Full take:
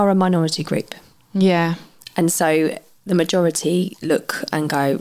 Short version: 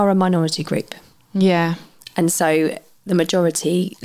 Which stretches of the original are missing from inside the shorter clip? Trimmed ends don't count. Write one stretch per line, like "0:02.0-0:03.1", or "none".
none